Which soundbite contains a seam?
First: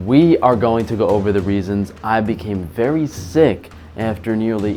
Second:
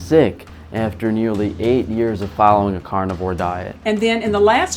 second; 1 cut; at 3.7 s

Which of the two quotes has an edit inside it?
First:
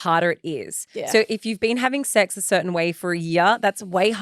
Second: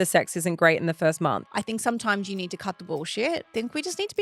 second; 2 cuts; at 1.4 s, 3.5 s

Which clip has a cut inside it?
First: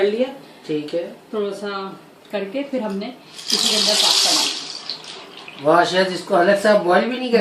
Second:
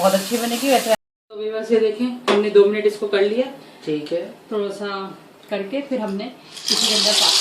second; 1 cut; at 1.0 s

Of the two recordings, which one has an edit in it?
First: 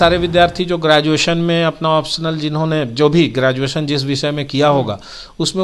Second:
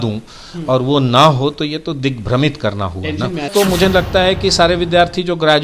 second; 1 cut; at 3.5 s

